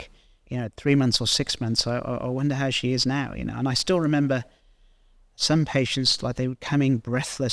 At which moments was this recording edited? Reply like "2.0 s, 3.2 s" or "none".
none